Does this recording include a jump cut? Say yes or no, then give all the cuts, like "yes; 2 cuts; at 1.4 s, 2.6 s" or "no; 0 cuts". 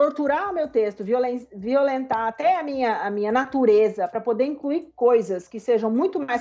no; 0 cuts